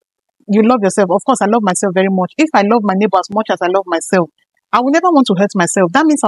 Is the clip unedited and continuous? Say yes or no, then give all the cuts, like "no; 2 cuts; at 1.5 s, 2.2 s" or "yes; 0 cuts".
yes; 0 cuts